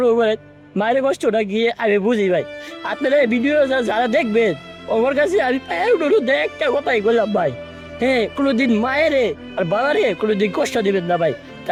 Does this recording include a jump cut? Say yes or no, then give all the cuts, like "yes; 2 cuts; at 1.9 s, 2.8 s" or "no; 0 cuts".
no; 0 cuts